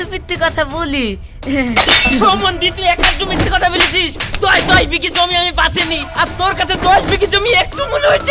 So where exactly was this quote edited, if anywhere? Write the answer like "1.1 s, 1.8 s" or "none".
none